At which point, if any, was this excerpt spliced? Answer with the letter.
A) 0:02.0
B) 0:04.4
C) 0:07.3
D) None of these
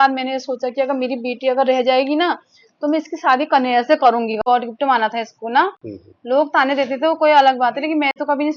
B